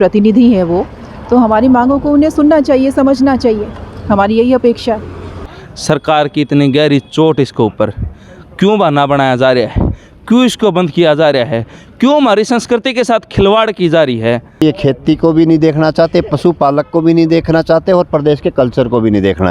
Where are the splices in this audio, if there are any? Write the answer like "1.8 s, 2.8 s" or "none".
5.4 s, 14.6 s